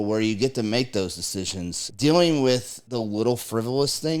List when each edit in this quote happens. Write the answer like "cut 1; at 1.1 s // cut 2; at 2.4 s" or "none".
cut 1; at 1.8 s // cut 2; at 2.8 s